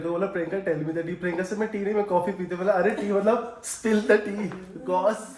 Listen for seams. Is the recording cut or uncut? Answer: uncut